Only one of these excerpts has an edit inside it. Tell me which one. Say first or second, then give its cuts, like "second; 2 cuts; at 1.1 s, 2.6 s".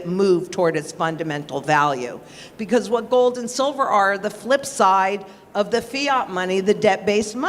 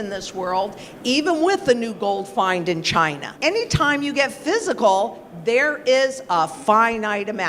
second; 1 cut; at 3.3 s